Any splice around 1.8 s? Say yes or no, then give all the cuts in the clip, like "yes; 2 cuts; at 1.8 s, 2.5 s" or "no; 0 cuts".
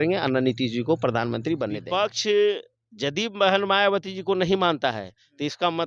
yes; 1 cut; at 1.8 s